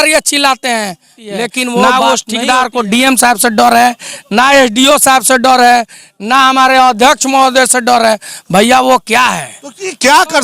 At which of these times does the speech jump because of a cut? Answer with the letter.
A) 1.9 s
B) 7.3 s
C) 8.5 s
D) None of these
A